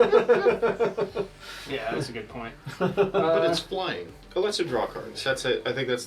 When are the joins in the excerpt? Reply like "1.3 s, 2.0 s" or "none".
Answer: none